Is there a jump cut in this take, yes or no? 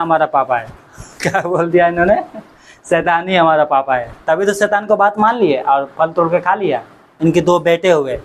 yes